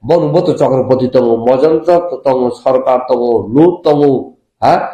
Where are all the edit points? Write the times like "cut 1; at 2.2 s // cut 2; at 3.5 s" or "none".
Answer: none